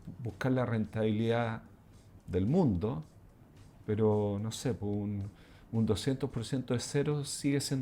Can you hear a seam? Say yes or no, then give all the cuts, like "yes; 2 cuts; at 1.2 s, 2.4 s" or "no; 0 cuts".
no; 0 cuts